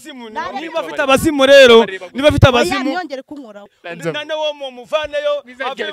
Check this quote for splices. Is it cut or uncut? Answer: cut